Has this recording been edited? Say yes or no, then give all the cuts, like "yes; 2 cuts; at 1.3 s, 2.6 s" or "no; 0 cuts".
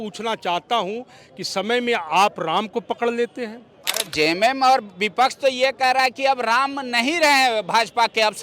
yes; 1 cut; at 4.0 s